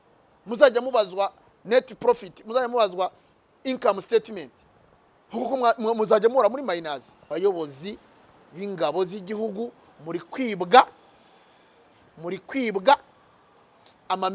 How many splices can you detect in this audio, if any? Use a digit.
1